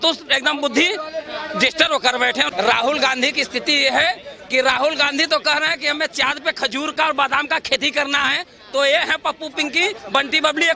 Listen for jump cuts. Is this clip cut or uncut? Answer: cut